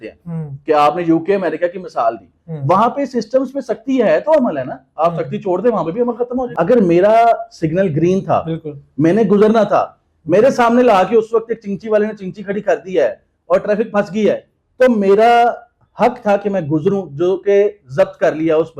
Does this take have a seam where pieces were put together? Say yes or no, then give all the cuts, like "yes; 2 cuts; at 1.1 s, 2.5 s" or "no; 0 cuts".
yes; 1 cut; at 6.5 s